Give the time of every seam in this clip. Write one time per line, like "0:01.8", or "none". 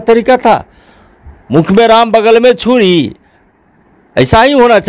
none